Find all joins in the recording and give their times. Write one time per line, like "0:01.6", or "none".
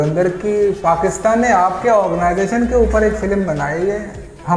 none